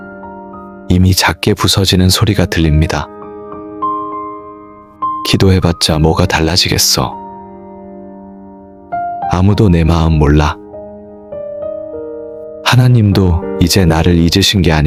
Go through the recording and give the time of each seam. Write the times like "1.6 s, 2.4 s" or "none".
none